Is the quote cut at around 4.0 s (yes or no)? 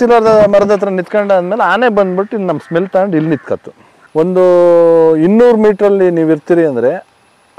yes